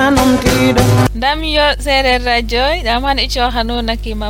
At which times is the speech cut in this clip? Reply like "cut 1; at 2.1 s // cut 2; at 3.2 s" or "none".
cut 1; at 1.0 s